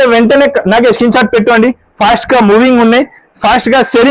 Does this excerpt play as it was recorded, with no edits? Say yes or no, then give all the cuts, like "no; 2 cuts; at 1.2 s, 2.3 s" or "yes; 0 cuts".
yes; 0 cuts